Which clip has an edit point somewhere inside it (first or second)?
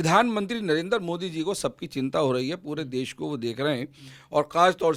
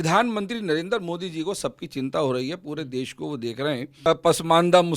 second